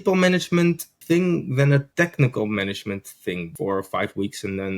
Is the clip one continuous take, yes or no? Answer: no